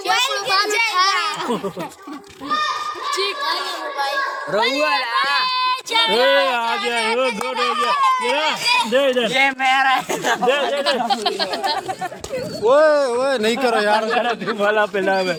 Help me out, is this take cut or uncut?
uncut